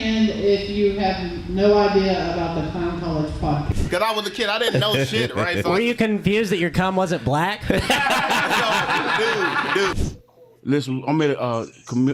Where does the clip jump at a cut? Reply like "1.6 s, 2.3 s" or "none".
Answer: 3.7 s, 9.9 s